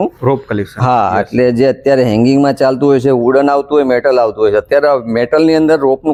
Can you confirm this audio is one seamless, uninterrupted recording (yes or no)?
yes